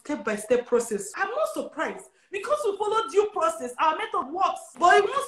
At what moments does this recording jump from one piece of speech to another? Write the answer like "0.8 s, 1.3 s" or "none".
1.1 s, 4.3 s

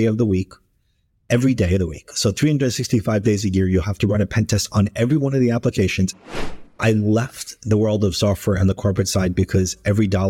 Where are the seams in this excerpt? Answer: 6.7 s

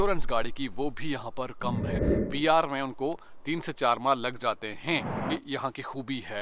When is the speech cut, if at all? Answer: 2.1 s, 5.3 s

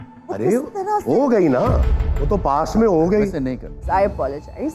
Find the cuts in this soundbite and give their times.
3.8 s

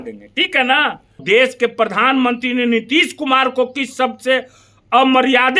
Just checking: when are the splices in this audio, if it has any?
1.2 s

